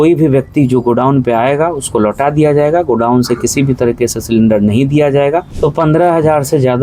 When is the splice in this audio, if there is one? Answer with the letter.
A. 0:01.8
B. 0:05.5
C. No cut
B